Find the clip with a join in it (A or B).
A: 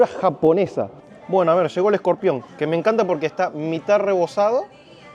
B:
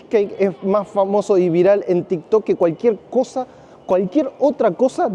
A